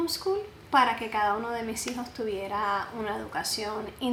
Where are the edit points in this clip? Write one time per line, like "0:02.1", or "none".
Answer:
none